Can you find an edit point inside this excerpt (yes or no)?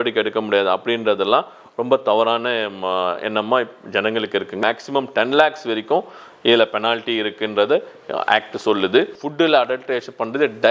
yes